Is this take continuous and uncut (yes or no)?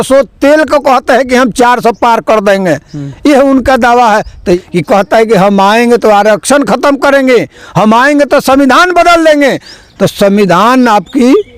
no